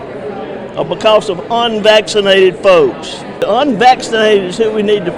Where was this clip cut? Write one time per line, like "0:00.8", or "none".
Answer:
0:03.2

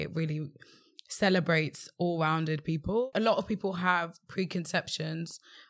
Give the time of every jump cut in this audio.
0:03.0

